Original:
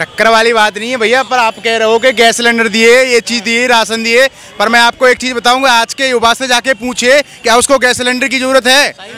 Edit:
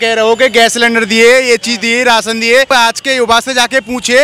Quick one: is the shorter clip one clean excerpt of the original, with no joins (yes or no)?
no